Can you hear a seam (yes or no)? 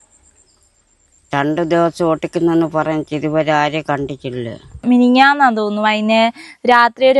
yes